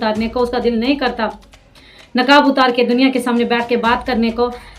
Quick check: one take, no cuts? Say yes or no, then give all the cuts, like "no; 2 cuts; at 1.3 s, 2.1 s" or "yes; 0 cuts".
yes; 0 cuts